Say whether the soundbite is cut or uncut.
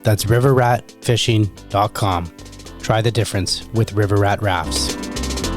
cut